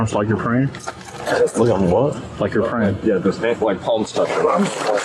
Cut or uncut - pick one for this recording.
uncut